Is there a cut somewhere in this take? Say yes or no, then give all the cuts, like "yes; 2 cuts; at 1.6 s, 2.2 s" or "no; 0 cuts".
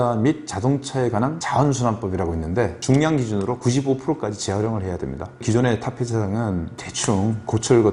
yes; 2 cuts; at 1.4 s, 2.8 s